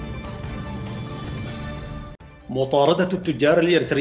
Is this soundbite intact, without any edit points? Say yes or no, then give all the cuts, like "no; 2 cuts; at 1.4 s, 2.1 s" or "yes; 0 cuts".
yes; 0 cuts